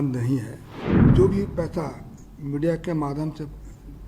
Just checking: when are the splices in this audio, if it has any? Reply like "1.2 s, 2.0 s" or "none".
1.0 s